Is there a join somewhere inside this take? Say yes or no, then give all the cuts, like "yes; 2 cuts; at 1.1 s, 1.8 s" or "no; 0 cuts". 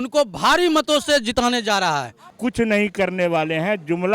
yes; 1 cut; at 2.3 s